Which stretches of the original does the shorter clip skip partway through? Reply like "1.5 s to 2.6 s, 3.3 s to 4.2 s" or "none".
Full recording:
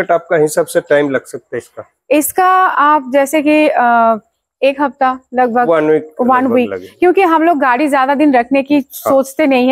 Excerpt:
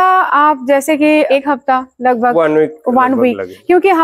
3.7 s to 4.6 s